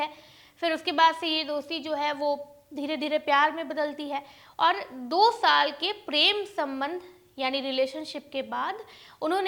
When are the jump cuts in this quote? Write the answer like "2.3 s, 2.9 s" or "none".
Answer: none